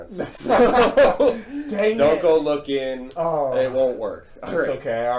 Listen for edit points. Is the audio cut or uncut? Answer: uncut